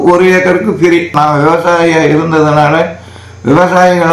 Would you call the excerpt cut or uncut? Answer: cut